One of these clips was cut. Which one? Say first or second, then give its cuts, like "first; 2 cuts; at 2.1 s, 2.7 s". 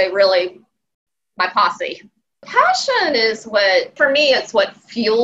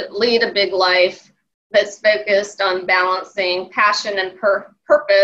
first; 2 cuts; at 2.5 s, 3.9 s